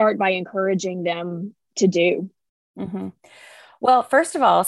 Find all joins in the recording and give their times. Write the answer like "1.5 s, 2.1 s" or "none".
none